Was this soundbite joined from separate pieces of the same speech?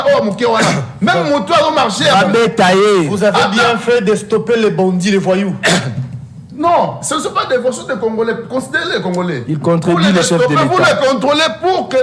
no; 0 cuts

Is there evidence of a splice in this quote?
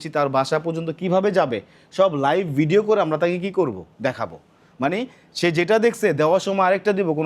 no; 0 cuts

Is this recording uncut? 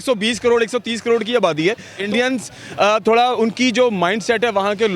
no; 1 cut; at 2.0 s

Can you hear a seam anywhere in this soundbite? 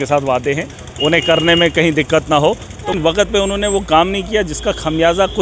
yes; 1 cut; at 3.0 s

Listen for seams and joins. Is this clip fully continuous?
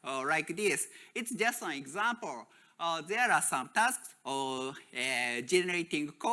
yes; 0 cuts

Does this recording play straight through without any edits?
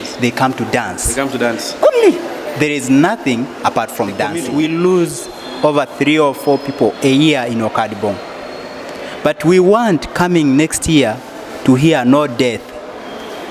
no; 1 cut; at 4.4 s

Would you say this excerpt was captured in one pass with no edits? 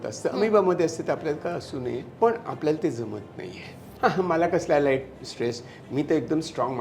no; 2 cuts; at 2.1 s, 3.8 s

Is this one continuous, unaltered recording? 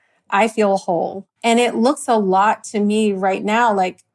no; 1 cut; at 1.2 s

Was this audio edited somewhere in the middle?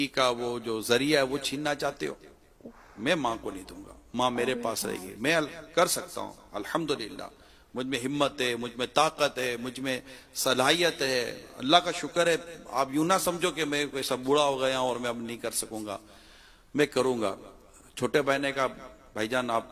no; 0 cuts

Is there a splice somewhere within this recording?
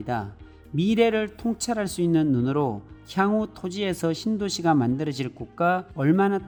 no; 0 cuts

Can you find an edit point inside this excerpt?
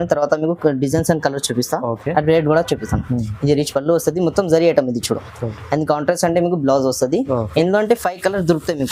no; 0 cuts

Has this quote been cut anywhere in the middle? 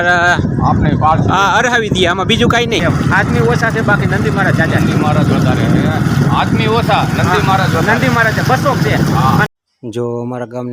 yes; 2 cuts; at 2.8 s, 9.5 s

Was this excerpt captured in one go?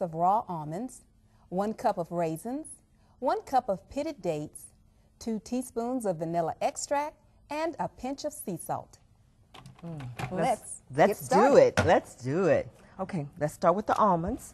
no; 1 cut; at 13.3 s

